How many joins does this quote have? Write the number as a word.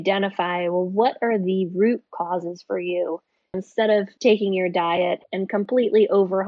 two